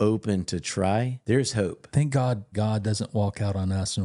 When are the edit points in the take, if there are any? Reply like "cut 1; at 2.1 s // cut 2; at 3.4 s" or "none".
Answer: cut 1; at 1.1 s // cut 2; at 2.5 s